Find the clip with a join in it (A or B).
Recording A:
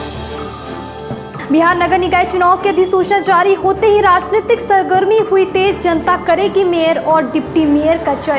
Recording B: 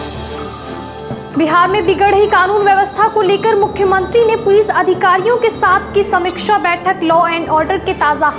A